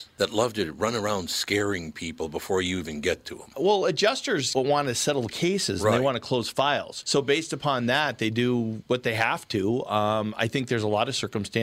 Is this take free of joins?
yes; 0 cuts

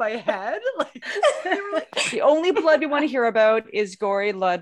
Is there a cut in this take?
yes; 1 cut; at 2.0 s

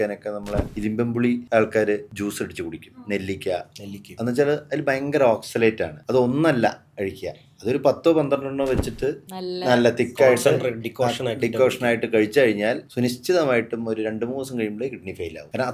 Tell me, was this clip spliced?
no; 0 cuts

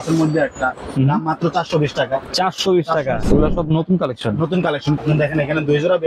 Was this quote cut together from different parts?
yes; 2 cuts; at 3.2 s, 5.0 s

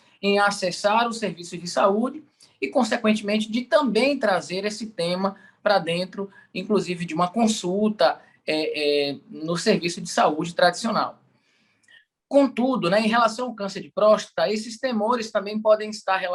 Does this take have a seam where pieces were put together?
no; 0 cuts

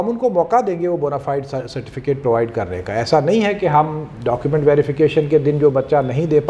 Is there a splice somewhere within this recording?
no; 0 cuts

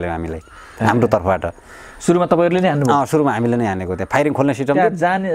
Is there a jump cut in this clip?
no; 0 cuts

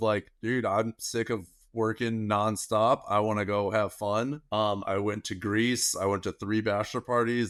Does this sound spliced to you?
no; 0 cuts

